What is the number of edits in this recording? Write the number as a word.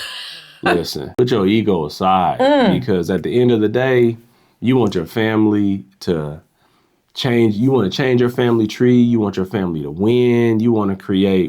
one